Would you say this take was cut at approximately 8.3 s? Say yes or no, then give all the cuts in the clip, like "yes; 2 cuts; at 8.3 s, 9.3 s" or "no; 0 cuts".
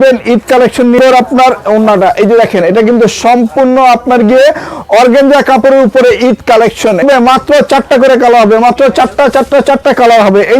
no; 2 cuts; at 1.0 s, 7.0 s